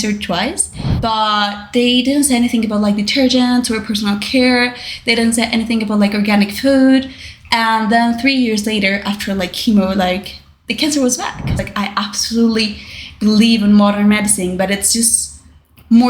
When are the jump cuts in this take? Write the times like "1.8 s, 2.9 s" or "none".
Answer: 0.9 s, 11.6 s

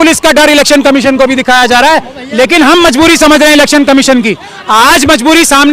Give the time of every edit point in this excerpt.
2.1 s

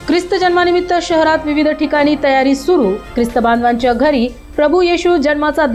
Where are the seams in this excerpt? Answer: none

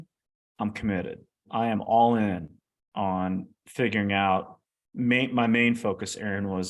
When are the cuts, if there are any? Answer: 1.4 s

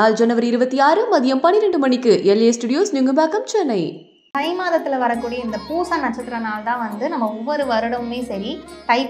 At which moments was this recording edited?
4.3 s

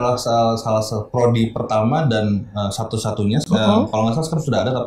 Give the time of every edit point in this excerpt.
none

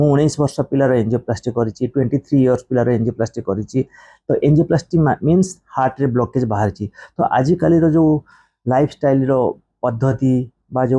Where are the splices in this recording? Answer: none

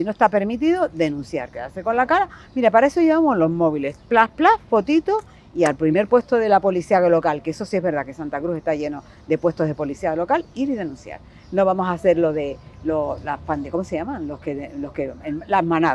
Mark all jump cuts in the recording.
none

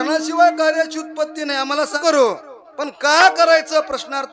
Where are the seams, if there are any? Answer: 2.0 s

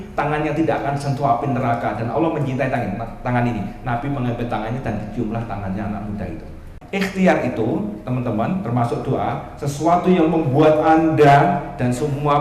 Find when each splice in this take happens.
6.8 s

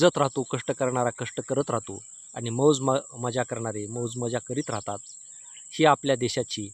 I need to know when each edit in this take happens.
none

